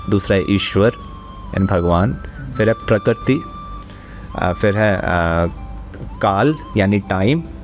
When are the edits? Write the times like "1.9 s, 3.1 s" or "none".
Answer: none